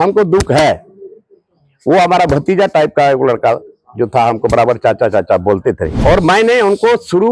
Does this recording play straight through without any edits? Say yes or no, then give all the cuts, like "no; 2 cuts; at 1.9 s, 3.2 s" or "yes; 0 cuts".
no; 1 cut; at 5.9 s